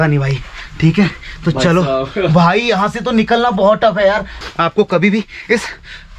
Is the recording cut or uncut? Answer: cut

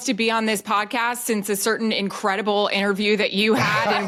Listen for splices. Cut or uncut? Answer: uncut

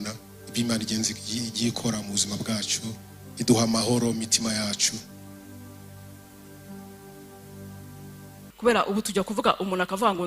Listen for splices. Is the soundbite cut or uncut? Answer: cut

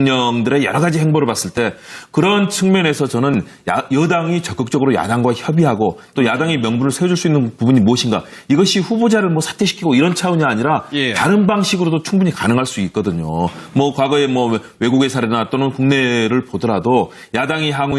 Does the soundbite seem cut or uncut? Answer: cut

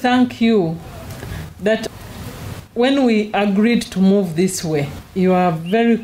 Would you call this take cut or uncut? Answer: cut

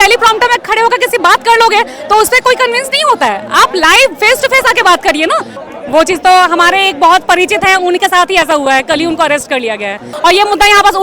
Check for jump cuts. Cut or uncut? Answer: cut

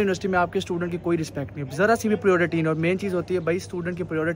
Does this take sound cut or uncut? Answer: uncut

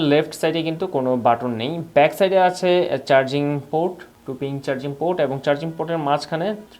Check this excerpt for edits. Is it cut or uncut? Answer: uncut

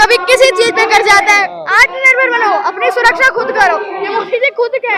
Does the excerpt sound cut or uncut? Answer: cut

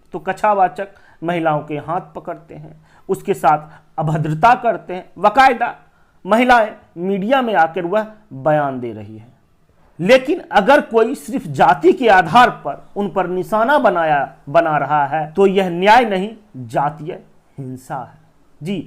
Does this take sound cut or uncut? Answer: uncut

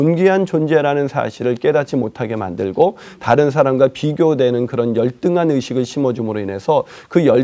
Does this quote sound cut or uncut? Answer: uncut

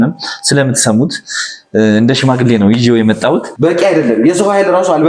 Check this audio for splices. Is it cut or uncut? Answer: cut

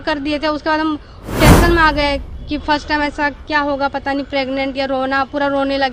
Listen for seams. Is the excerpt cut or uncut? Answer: uncut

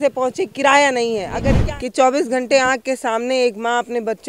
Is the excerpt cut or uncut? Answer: cut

